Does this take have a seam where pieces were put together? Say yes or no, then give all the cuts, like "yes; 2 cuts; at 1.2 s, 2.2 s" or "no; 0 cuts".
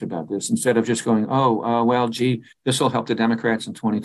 no; 0 cuts